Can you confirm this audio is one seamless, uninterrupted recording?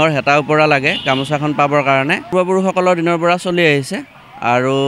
no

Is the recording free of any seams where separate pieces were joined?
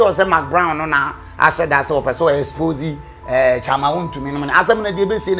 yes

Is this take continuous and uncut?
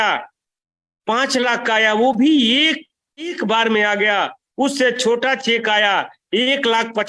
no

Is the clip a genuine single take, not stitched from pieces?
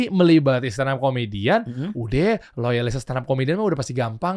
yes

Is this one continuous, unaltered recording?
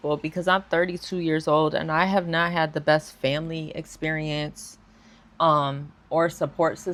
yes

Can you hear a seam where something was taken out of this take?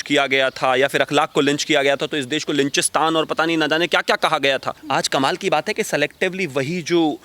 yes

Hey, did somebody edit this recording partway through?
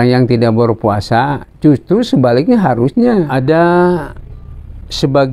yes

